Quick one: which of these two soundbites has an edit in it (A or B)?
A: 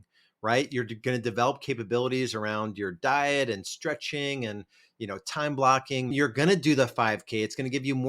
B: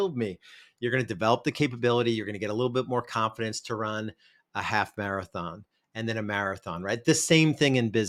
A